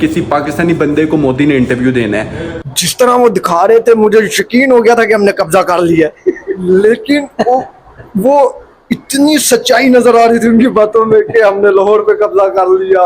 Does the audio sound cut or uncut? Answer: cut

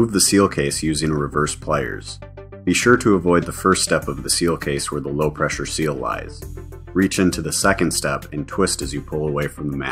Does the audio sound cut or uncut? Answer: uncut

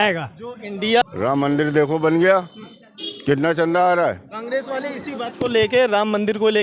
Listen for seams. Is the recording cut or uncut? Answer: cut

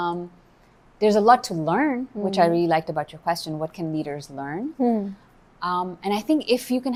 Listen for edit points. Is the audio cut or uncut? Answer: uncut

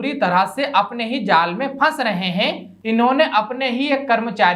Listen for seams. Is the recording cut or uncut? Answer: cut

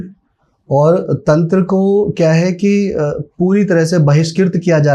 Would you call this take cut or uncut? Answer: uncut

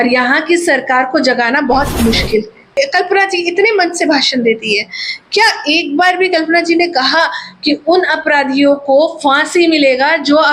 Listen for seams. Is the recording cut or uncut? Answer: cut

